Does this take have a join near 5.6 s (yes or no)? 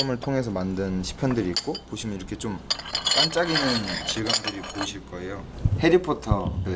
yes